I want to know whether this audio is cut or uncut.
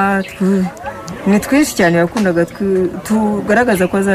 cut